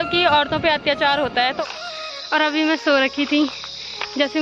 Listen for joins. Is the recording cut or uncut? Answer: cut